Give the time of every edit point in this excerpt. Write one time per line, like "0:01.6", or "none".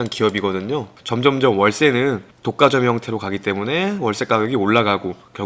0:01.0